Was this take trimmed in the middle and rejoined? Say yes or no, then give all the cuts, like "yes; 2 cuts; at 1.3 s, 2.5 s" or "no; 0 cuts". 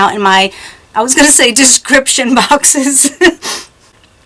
no; 0 cuts